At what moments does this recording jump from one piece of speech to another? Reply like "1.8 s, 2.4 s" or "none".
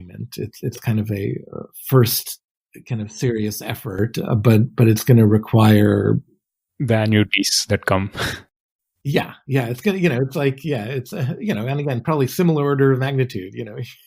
none